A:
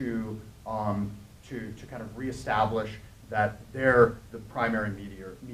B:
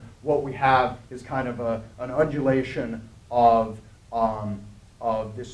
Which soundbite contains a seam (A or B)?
A